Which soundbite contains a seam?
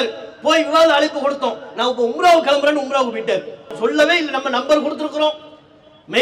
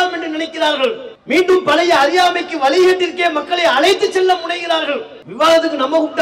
second; 2 cuts; at 1.1 s, 5.2 s

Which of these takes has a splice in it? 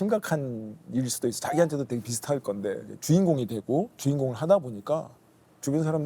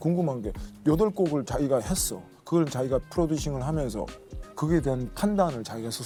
first; 1 cut; at 2.9 s

